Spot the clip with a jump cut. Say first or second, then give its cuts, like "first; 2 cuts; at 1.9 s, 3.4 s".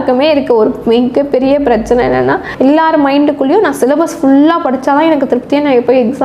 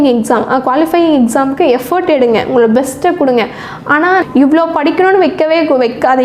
second; 1 cut; at 4.2 s